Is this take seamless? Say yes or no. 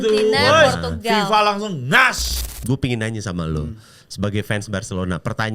no